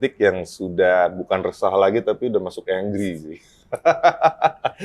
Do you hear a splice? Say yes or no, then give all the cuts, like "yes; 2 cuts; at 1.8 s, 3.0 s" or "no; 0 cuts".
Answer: no; 0 cuts